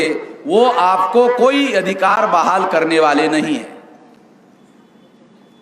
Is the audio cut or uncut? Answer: uncut